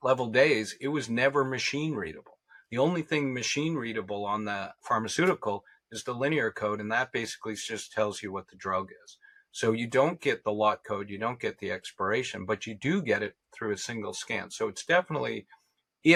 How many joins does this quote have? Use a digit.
0